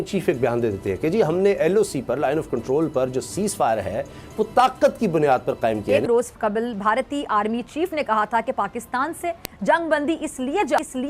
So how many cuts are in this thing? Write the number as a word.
one